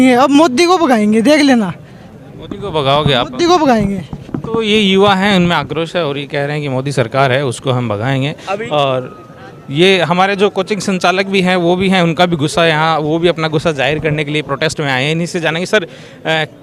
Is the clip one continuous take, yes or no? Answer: yes